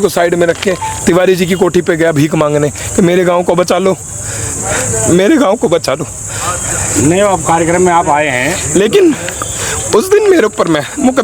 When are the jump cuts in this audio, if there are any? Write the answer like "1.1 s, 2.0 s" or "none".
none